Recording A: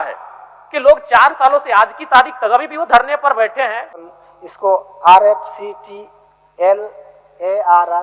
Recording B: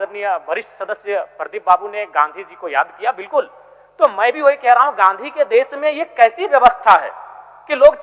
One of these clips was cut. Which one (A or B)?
A